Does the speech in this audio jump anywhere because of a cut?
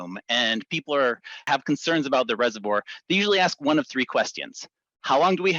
yes; 1 cut; at 1.5 s

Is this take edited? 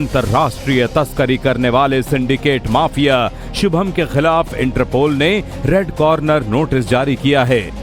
no; 0 cuts

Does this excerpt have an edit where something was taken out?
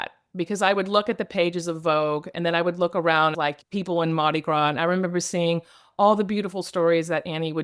no; 0 cuts

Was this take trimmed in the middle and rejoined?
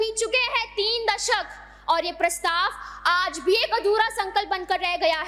no; 0 cuts

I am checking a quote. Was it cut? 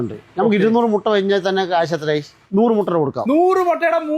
yes; 1 cut; at 2.4 s

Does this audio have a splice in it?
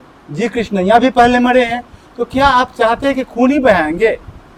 no; 0 cuts

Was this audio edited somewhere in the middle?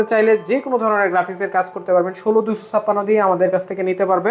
no; 0 cuts

